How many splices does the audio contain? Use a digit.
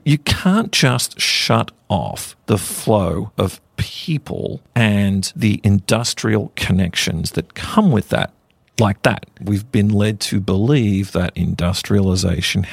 3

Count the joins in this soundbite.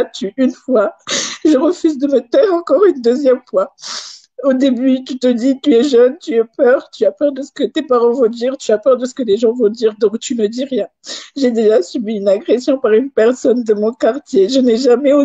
1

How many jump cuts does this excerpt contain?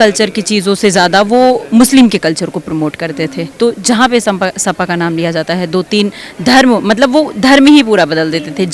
1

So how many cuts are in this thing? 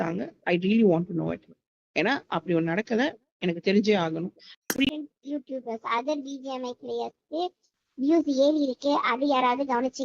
1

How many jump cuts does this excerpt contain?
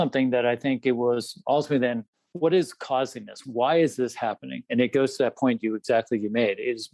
2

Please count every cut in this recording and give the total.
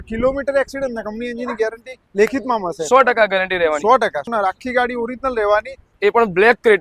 2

